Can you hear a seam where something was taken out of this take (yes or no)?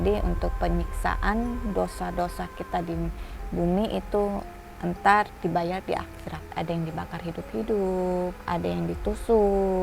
yes